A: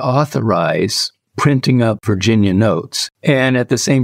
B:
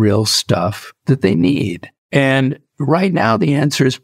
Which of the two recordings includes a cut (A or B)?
A